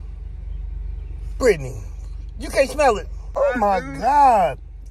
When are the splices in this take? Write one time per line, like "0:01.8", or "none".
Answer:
0:03.2

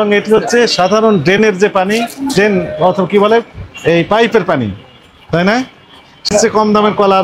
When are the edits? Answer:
0:06.3

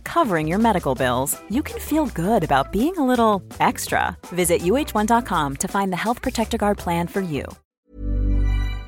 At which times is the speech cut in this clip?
0:07.6

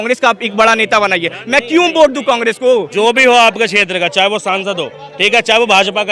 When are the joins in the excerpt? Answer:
0:02.9

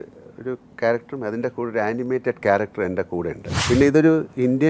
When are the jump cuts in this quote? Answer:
0:03.6

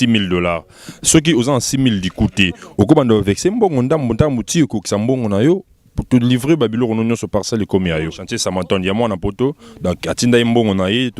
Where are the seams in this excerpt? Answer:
0:08.3

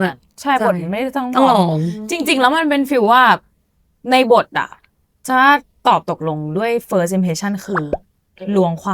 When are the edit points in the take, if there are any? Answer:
none

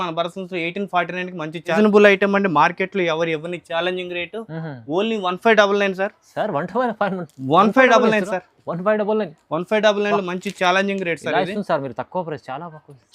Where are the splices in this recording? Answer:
0:01.7

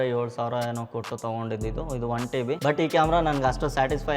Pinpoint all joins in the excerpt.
0:02.6

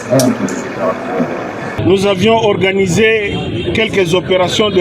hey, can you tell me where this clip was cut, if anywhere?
0:01.8

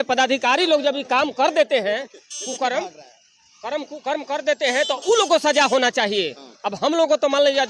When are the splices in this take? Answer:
none

